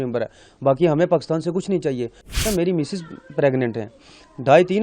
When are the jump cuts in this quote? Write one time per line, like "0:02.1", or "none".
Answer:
0:02.4